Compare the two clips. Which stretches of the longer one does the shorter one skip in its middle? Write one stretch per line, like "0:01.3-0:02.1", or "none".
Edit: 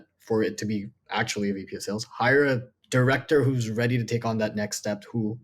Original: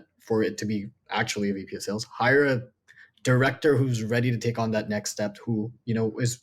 0:02.7-0:03.1